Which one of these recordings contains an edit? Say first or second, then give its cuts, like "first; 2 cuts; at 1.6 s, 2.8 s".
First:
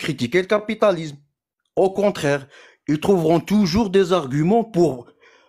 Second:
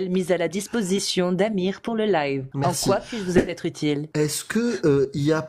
second; 2 cuts; at 2.5 s, 4.1 s